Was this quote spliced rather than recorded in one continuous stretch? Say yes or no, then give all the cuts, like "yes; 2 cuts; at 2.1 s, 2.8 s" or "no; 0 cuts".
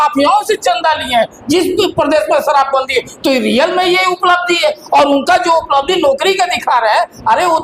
no; 0 cuts